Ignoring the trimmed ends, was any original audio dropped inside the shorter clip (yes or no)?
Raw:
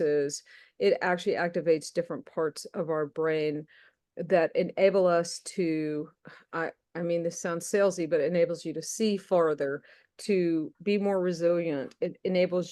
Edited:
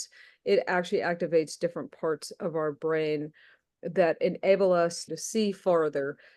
yes